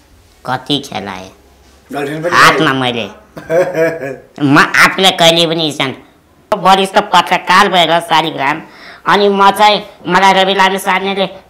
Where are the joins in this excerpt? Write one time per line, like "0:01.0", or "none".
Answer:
0:06.6